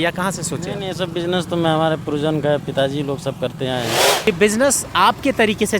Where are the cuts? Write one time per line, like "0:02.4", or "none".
0:04.3